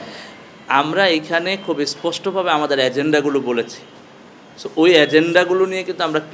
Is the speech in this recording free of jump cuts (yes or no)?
yes